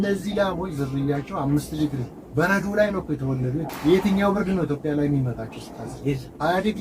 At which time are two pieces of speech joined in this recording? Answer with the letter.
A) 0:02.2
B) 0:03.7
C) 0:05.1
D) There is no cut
B